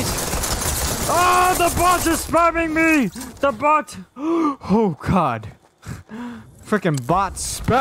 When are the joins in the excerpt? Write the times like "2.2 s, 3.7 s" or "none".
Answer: none